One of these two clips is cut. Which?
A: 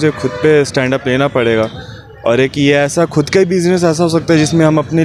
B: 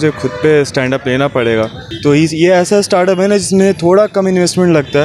B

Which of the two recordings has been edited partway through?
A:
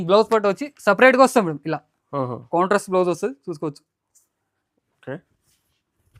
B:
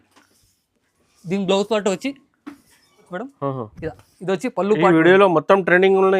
B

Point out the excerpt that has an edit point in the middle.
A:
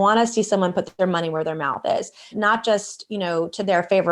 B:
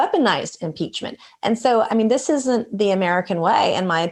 A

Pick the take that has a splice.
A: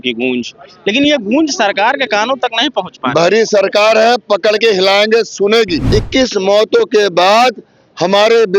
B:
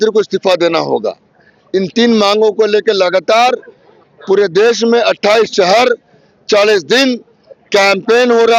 A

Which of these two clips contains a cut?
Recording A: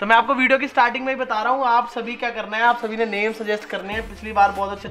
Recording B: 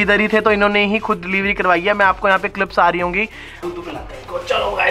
B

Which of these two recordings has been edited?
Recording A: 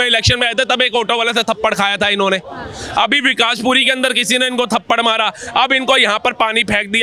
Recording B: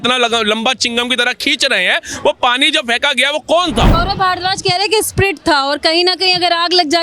B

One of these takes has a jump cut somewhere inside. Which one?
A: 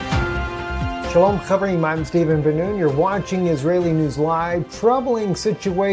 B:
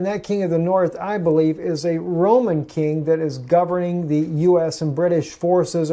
A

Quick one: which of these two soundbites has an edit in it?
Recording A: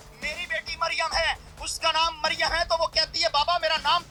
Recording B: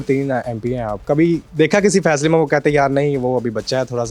B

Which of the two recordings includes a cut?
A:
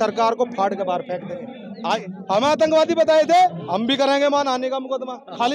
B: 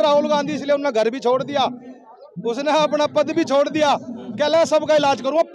A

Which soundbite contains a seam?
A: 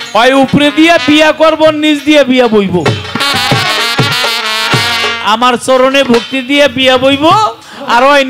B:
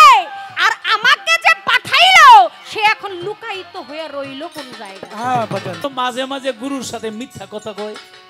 B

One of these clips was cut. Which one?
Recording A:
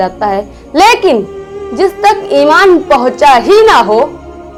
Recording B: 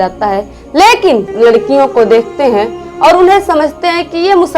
B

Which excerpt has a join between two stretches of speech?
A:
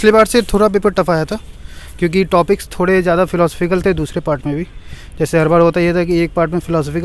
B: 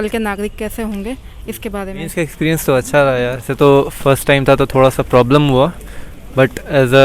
B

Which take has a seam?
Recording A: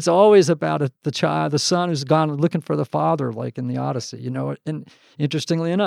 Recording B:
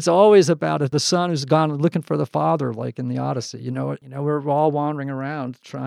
B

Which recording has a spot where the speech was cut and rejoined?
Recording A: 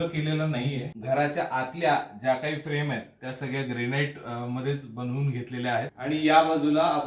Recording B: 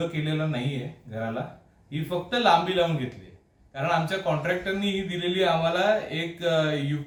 A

